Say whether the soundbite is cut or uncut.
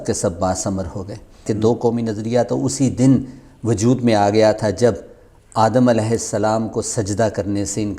cut